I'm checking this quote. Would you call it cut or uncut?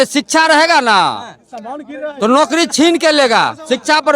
uncut